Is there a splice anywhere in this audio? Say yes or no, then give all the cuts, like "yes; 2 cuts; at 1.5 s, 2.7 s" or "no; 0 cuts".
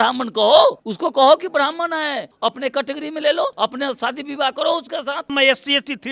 yes; 4 cuts; at 0.9 s, 2.3 s, 3.5 s, 5.3 s